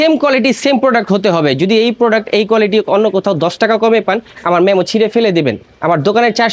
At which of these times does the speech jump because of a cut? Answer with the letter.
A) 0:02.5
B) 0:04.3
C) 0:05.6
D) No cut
D